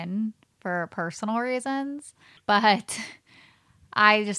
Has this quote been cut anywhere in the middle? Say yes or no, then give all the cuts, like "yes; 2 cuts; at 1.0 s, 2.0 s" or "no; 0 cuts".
yes; 1 cut; at 2.4 s